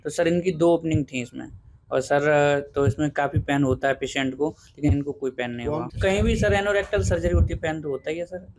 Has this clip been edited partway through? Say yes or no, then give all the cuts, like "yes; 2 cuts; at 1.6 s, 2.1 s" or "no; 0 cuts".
no; 0 cuts